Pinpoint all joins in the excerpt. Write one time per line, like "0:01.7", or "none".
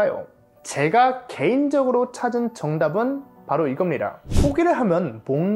0:04.2